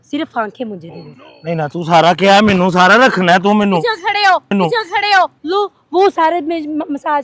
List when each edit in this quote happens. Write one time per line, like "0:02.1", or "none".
0:05.4